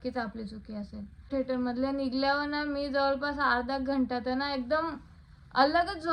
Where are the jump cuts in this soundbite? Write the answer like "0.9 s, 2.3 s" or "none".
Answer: 1.3 s